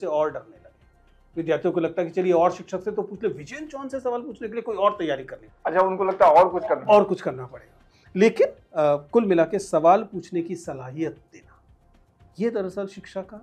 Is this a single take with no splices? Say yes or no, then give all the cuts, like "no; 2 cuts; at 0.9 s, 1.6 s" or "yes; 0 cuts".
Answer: yes; 0 cuts